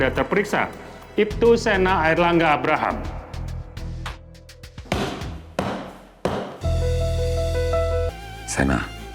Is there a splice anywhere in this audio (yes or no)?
yes